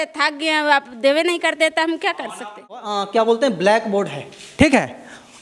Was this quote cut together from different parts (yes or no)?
yes